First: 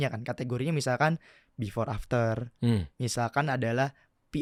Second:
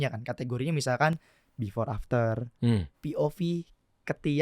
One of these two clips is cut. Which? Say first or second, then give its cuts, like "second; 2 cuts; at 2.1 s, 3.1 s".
second; 1 cut; at 2.9 s